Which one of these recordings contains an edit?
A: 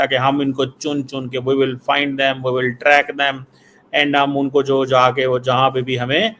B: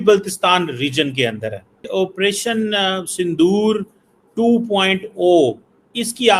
B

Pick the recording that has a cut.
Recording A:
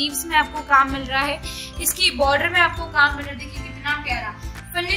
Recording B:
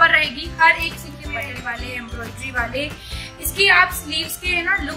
B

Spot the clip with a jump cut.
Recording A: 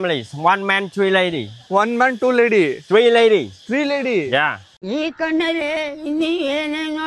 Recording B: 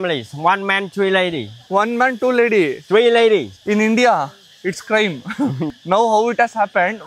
B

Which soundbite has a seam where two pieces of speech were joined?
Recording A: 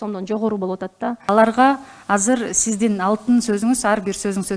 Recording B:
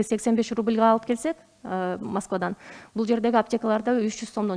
A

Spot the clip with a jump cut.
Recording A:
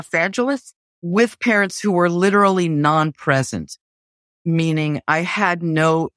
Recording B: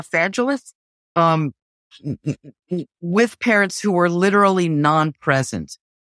A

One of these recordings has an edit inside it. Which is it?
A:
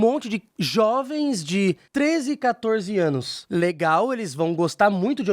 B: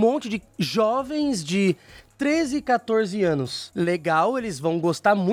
A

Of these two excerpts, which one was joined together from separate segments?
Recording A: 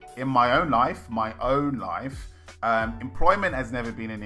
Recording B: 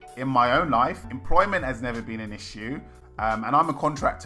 B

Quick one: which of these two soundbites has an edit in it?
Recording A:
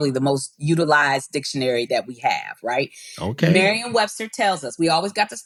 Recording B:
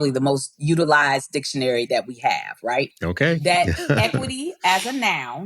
B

